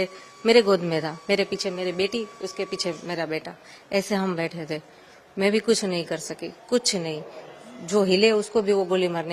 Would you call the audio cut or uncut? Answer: uncut